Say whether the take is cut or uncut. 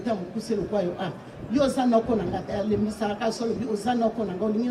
uncut